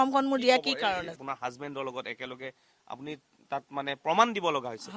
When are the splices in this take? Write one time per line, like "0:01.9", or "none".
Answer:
0:01.2